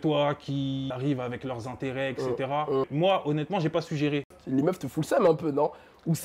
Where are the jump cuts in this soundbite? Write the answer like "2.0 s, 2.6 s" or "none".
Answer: 0.9 s, 2.9 s, 4.3 s